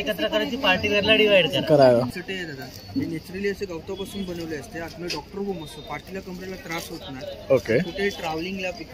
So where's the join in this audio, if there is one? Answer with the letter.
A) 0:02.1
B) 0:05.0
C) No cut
A